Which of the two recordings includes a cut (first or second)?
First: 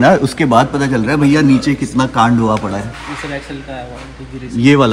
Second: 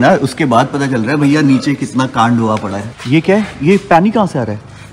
second